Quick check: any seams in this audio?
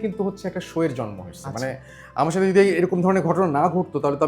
no; 0 cuts

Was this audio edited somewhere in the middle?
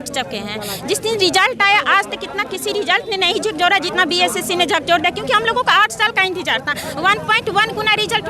no; 0 cuts

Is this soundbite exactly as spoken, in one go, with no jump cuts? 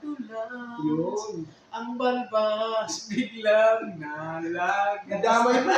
yes; 0 cuts

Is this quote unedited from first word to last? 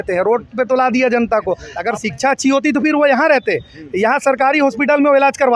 no; 1 cut; at 1.7 s

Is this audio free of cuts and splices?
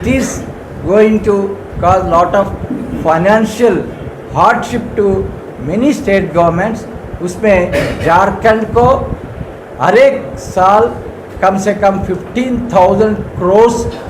yes; 0 cuts

